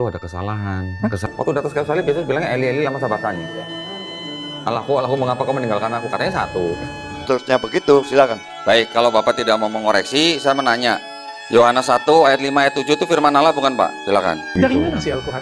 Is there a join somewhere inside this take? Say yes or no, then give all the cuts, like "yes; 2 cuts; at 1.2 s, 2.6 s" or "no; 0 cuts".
yes; 3 cuts; at 1.3 s, 7.2 s, 14.5 s